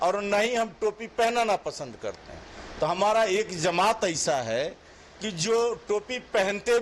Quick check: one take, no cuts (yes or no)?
yes